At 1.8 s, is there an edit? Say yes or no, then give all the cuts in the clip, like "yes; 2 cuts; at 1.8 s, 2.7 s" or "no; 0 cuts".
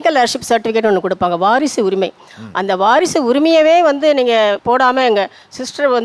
no; 1 cut; at 4.6 s